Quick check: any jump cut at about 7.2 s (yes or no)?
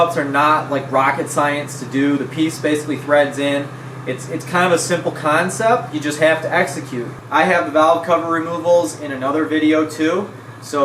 yes